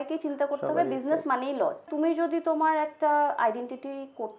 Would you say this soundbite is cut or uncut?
cut